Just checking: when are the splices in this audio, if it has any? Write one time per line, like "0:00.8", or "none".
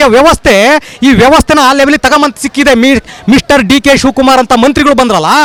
none